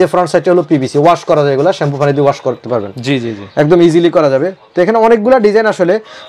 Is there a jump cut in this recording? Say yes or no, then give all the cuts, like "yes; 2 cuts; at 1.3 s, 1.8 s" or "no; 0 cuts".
no; 0 cuts